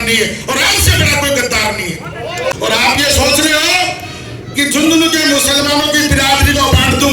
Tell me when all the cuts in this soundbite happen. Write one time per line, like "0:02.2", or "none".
0:02.6